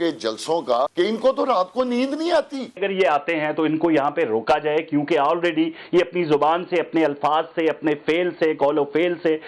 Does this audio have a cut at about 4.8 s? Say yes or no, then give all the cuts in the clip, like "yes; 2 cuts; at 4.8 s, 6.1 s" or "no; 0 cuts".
no; 2 cuts; at 0.9 s, 2.8 s